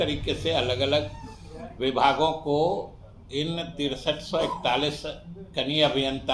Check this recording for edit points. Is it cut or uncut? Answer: uncut